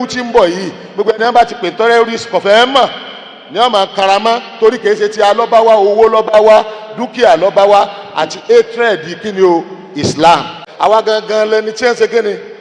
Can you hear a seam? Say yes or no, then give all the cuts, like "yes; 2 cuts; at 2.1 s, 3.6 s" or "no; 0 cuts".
yes; 1 cut; at 10.9 s